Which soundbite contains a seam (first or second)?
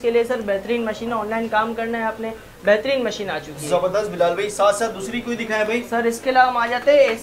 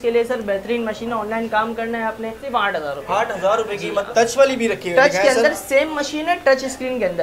second